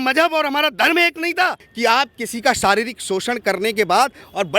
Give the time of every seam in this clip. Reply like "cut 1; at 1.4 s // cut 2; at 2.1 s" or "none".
cut 1; at 1.6 s